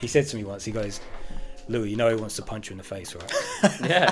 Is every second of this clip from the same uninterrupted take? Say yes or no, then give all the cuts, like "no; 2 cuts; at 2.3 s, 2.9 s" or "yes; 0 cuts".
yes; 0 cuts